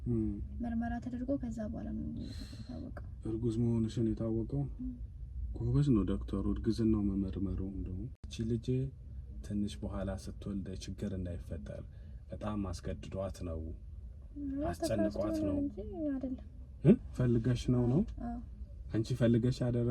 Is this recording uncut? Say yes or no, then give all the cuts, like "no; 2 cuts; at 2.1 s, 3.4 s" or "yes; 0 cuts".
no; 2 cuts; at 8.2 s, 17.1 s